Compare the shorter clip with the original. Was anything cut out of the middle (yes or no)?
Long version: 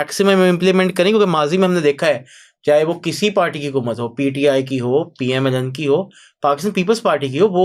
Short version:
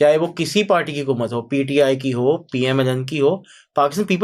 no